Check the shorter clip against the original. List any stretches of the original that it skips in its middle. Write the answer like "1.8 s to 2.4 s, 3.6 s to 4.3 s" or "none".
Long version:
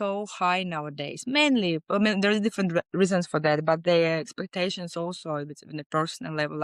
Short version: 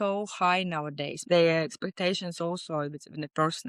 1.2 s to 3.8 s